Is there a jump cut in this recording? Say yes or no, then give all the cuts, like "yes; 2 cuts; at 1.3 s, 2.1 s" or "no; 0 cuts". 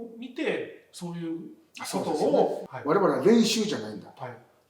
yes; 1 cut; at 2.6 s